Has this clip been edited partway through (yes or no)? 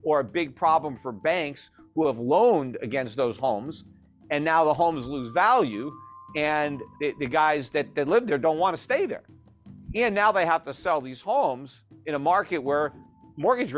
yes